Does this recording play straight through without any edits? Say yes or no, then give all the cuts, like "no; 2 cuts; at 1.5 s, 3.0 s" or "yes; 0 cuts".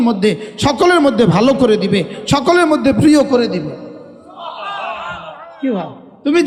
yes; 0 cuts